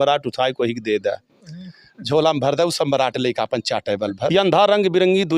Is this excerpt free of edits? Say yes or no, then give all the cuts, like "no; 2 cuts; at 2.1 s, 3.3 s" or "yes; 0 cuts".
no; 1 cut; at 4.3 s